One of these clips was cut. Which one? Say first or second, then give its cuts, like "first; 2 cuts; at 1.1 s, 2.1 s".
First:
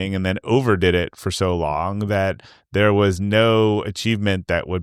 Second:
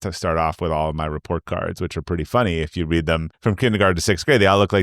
second; 1 cut; at 3.3 s